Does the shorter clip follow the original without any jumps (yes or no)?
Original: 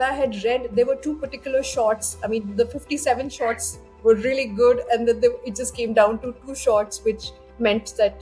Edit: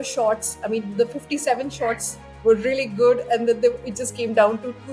yes